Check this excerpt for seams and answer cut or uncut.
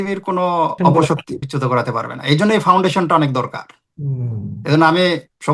cut